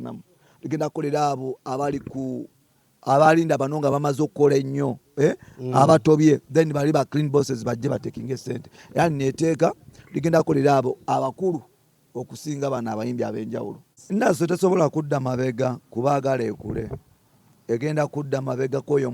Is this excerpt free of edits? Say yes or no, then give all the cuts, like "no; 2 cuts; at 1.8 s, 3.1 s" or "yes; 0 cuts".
no; 1 cut; at 13.9 s